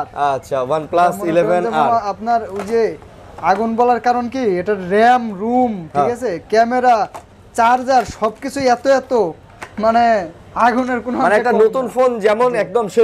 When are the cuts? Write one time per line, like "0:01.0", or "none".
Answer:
none